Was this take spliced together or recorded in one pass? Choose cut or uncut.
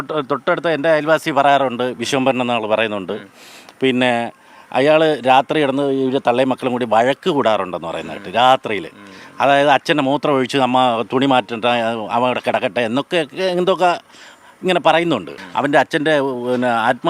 cut